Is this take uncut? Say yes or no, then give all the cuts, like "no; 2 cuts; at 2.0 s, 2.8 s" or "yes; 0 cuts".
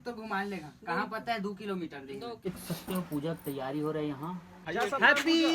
no; 2 cuts; at 2.4 s, 4.6 s